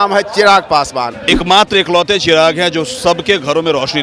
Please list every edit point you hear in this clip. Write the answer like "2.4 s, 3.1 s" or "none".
1.2 s